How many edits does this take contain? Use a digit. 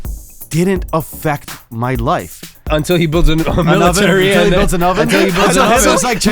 1